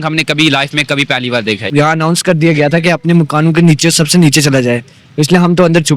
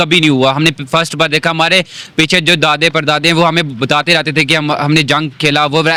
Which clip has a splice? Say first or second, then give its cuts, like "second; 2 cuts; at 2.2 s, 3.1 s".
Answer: first; 1 cut; at 1.7 s